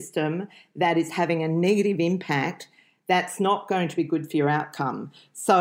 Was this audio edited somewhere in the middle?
no; 0 cuts

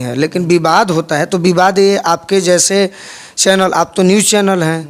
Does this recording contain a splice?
no; 0 cuts

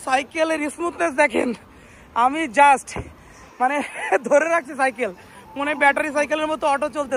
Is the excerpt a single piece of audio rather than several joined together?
yes; 0 cuts

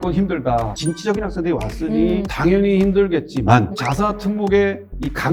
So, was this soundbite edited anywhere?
yes; 3 cuts; at 0.8 s, 2.3 s, 3.7 s

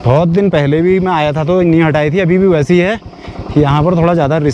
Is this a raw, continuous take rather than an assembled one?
yes; 0 cuts

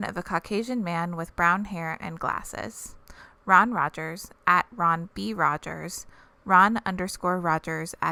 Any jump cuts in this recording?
no; 0 cuts

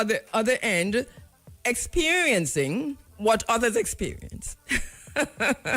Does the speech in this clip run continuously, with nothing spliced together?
no; 1 cut; at 3.0 s

